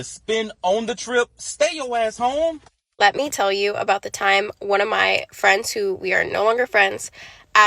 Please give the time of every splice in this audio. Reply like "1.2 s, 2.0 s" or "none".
2.9 s